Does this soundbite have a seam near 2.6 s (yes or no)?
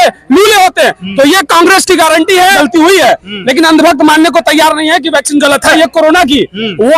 yes